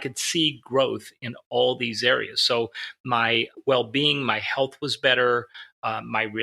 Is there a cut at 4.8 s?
no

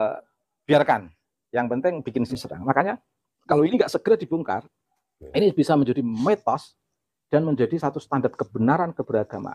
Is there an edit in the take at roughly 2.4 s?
yes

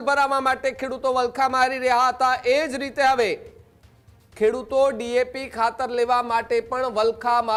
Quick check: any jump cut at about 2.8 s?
no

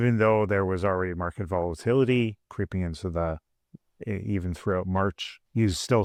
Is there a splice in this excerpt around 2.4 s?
no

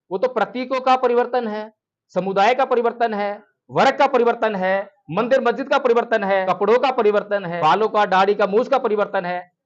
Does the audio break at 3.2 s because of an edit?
no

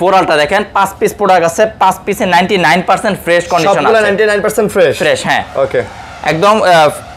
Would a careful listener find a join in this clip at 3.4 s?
no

